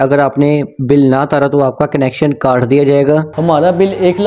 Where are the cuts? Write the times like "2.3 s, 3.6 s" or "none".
3.3 s